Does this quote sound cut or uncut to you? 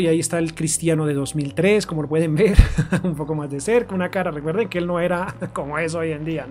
uncut